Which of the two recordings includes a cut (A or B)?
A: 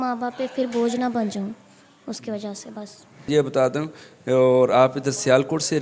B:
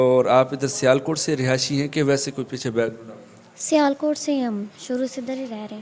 A